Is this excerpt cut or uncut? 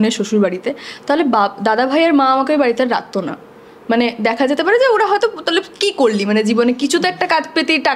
uncut